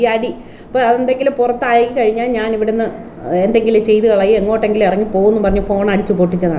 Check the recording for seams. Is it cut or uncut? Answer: uncut